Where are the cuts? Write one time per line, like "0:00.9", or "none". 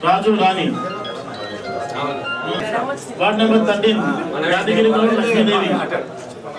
0:02.6

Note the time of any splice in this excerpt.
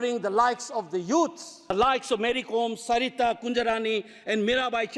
0:01.5

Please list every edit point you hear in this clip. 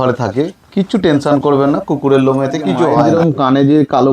0:03.1

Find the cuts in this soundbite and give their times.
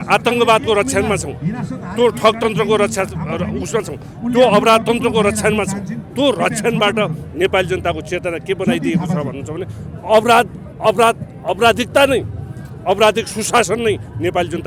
none

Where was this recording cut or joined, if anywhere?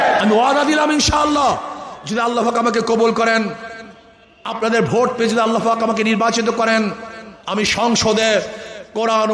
none

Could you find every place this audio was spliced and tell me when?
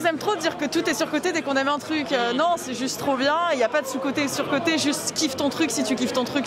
none

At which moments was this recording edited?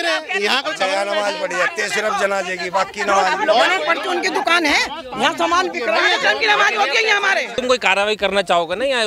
0:07.6

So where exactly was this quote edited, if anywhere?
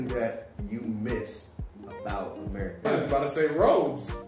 0:02.8

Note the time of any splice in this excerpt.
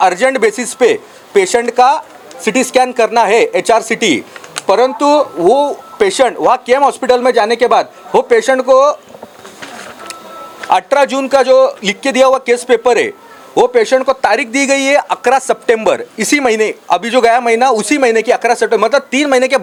none

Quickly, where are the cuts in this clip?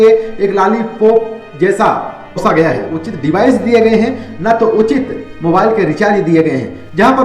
0:03.1

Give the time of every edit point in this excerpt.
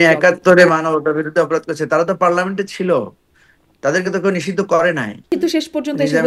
0:05.3

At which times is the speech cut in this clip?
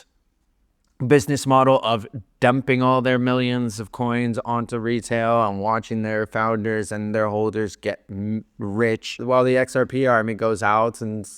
0:09.2

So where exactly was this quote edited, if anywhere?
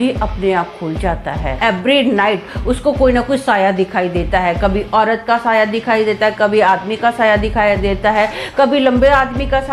0:01.6

